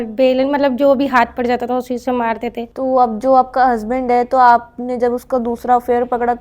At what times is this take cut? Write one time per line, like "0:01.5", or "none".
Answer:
0:02.7